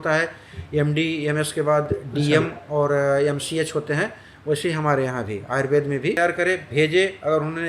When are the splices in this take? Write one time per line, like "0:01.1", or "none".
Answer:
0:06.2

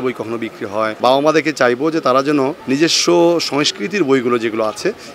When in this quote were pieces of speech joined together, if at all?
0:01.0
0:02.6

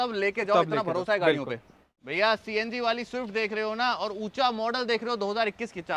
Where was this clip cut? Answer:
0:02.1

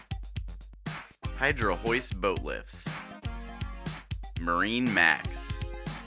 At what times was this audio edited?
0:01.0
0:05.2

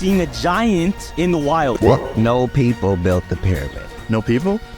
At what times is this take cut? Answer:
0:01.8

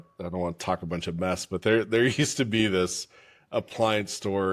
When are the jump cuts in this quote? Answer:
none

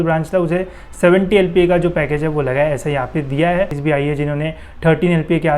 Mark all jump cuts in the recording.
0:03.8

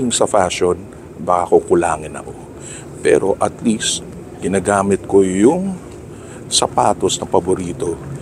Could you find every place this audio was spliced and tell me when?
none

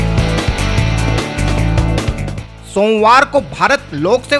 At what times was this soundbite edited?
0:02.4

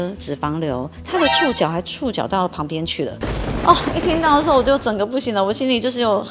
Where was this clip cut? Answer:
none

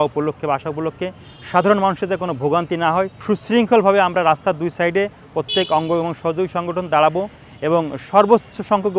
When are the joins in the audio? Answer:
0:03.2

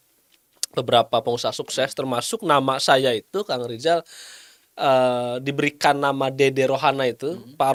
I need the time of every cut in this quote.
none

